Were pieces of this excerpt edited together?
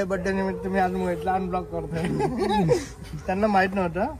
no; 0 cuts

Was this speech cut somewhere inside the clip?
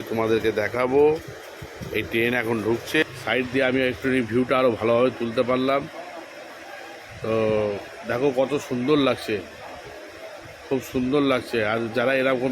yes; 1 cut; at 3.0 s

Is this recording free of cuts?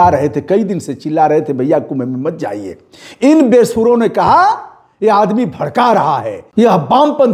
no; 1 cut; at 6.4 s

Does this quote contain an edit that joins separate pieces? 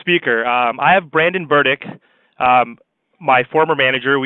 yes; 1 cut; at 3.0 s

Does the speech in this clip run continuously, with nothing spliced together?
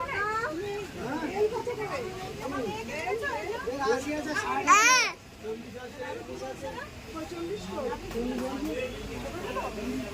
yes; 0 cuts

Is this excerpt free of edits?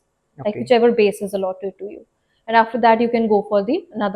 yes; 0 cuts

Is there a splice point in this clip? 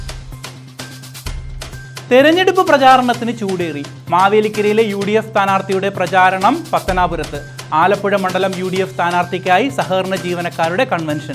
yes; 1 cut; at 1.0 s

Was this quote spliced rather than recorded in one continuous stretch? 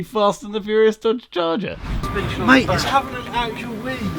yes; 1 cut; at 2.0 s

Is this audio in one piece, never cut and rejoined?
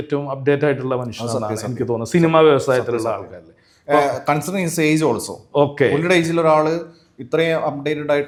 yes; 0 cuts

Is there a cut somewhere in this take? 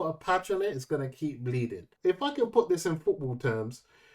yes; 1 cut; at 1.9 s

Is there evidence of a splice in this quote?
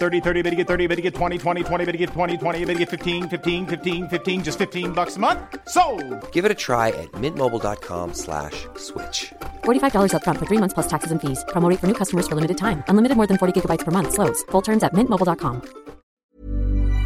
yes; 1 cut; at 16.1 s

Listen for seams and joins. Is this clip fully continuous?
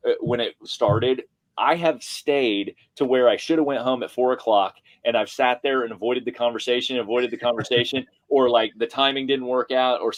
yes; 0 cuts

